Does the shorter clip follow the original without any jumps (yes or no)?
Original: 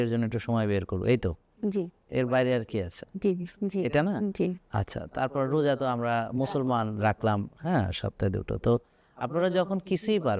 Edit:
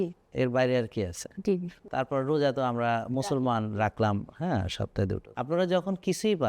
no